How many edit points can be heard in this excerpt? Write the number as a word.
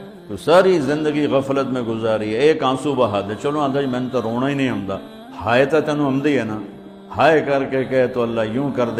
zero